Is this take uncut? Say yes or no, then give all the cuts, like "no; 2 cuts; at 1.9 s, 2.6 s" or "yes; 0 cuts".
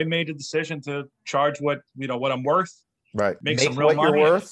no; 2 cuts; at 1.0 s, 3.4 s